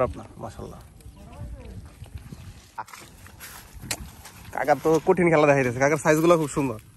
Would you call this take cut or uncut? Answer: cut